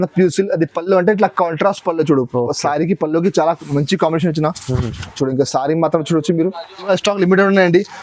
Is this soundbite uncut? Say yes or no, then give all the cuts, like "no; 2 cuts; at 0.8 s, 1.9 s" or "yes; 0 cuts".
no; 1 cut; at 6.9 s